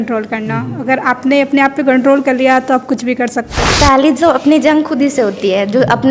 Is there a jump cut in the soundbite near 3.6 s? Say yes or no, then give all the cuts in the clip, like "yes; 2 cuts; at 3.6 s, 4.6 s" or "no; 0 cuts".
yes; 1 cut; at 3.6 s